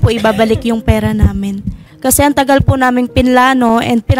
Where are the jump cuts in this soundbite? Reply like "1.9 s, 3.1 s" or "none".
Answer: 1.8 s